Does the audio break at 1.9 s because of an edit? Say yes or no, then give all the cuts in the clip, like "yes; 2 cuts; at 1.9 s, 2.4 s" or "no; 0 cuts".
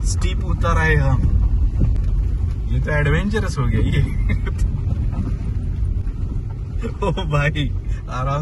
yes; 1 cut; at 1.9 s